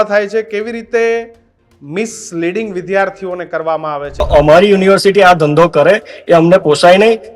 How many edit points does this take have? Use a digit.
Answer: 1